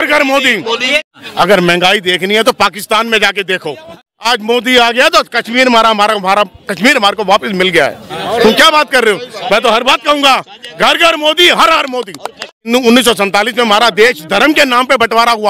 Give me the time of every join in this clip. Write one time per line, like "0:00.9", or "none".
0:01.1
0:04.2
0:12.7